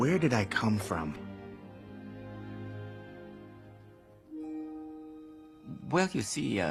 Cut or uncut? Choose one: uncut